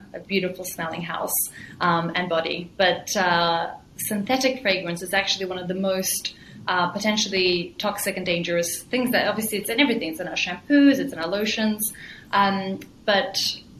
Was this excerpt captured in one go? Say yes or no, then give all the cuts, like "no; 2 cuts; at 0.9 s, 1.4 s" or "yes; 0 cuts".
yes; 0 cuts